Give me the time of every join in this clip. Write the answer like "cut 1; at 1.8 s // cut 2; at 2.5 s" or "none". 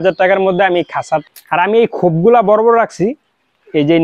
cut 1; at 1.2 s